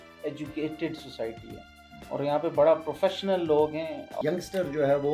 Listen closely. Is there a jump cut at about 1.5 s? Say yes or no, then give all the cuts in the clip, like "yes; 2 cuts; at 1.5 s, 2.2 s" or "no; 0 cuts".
no; 1 cut; at 4.1 s